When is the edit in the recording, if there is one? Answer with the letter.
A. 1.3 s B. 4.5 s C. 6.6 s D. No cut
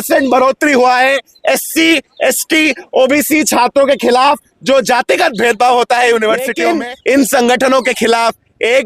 C